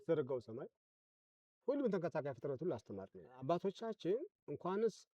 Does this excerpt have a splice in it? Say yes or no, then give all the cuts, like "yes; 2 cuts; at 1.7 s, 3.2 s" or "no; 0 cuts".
yes; 1 cut; at 3.4 s